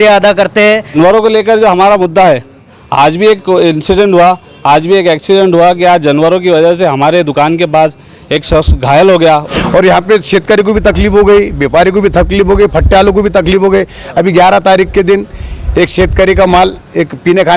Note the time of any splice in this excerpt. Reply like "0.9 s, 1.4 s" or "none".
1.0 s, 9.5 s